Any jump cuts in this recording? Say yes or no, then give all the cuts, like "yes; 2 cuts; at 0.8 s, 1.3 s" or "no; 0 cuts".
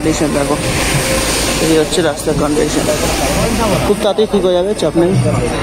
no; 0 cuts